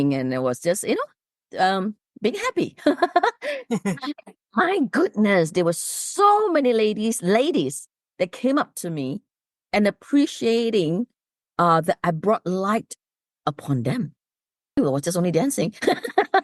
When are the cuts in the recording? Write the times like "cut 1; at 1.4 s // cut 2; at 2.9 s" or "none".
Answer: cut 1; at 14.8 s